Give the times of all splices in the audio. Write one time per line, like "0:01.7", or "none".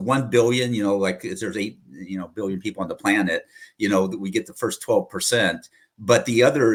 none